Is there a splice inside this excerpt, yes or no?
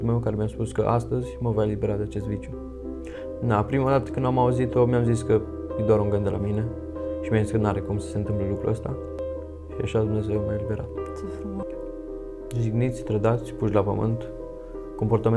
yes